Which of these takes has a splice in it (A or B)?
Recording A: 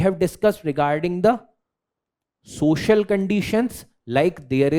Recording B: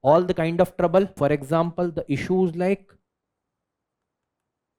B